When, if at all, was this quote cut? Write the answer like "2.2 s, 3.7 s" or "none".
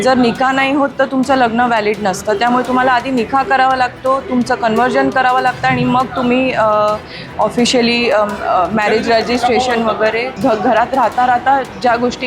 10.3 s